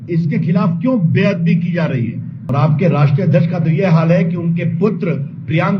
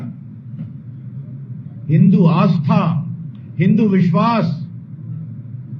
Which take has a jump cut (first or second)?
first